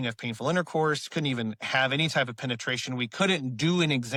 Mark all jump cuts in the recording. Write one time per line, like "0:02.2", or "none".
none